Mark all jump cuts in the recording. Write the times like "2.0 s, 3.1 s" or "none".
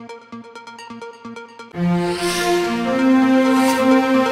0.9 s